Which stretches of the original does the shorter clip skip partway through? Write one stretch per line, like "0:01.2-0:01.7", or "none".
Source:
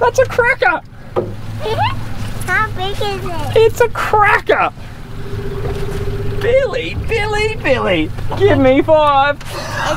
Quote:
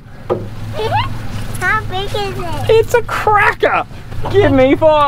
0:05.0-0:08.2